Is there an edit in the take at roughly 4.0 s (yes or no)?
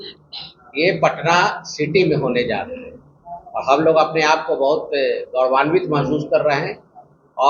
no